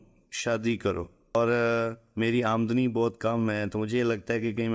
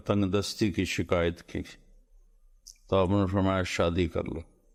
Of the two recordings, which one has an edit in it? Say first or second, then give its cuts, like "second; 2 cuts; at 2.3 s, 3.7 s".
first; 1 cut; at 1.4 s